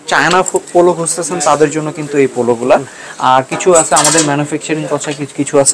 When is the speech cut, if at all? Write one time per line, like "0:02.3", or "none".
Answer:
none